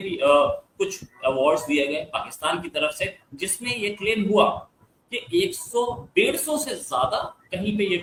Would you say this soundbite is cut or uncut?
uncut